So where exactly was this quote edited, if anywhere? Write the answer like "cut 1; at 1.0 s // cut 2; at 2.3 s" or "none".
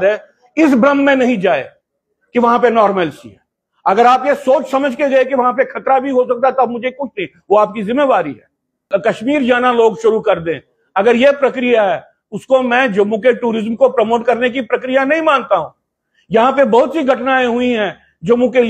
cut 1; at 8.8 s